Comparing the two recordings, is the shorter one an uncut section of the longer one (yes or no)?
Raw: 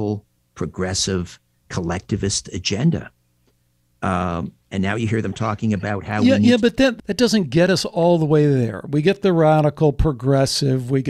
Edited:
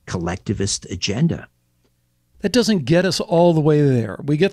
no